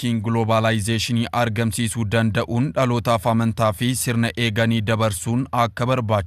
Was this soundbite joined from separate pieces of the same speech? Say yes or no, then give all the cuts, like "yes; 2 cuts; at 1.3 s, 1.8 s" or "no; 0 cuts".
no; 0 cuts